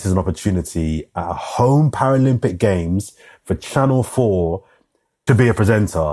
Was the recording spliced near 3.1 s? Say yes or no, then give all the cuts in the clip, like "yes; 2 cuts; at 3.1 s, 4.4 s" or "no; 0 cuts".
no; 1 cut; at 5.2 s